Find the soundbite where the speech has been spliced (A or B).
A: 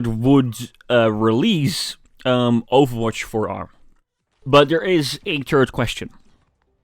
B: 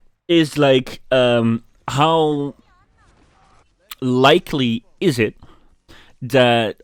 A